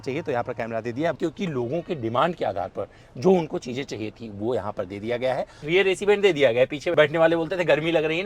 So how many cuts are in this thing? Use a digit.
3